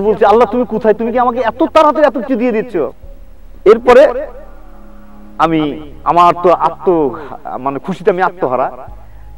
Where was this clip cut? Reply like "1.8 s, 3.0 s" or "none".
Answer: 3.0 s